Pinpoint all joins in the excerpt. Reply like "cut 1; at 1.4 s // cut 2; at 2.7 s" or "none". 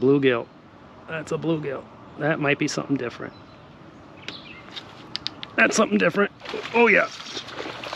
none